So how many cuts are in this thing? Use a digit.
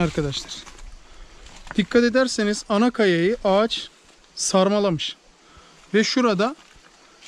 0